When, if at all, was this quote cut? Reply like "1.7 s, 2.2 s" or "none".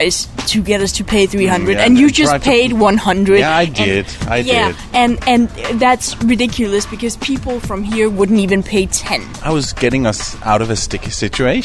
9.3 s

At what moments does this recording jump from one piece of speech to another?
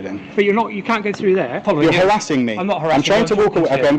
1.6 s

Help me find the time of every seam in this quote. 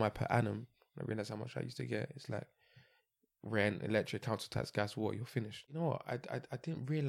5.7 s

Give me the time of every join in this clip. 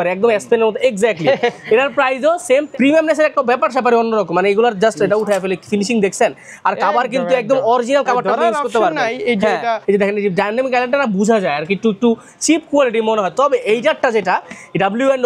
2.7 s, 9.8 s

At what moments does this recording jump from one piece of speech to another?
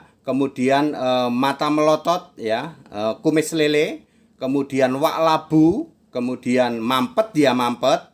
none

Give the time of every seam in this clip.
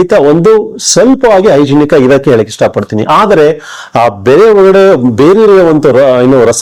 none

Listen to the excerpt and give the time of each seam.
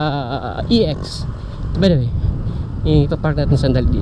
1.6 s

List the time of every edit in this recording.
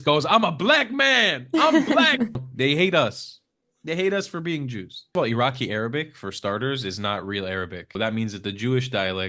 2.4 s, 5.1 s, 8.0 s

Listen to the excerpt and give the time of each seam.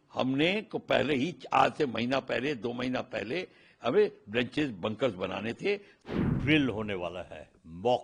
5.9 s

